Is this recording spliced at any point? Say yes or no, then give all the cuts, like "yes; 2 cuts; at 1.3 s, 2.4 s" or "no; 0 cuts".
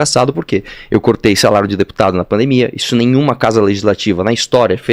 no; 0 cuts